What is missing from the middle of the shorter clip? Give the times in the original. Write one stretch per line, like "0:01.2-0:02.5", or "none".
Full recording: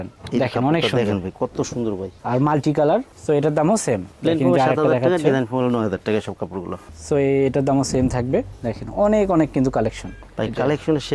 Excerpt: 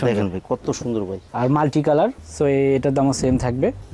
0:03.1-0:06.9